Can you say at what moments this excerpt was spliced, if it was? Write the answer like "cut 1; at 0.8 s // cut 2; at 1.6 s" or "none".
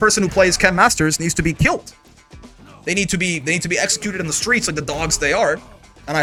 none